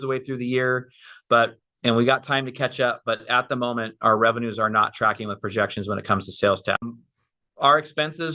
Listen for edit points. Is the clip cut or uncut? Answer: cut